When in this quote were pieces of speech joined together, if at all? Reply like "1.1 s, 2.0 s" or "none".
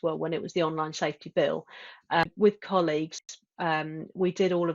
2.2 s